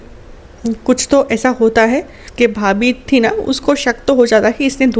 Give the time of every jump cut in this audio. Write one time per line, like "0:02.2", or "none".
0:02.2